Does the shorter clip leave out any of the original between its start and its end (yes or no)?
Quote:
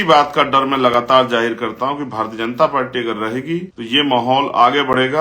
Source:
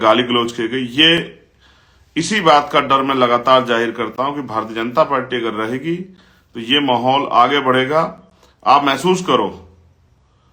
yes